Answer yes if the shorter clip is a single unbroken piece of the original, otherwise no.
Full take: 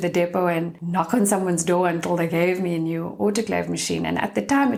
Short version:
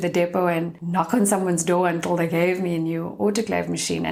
yes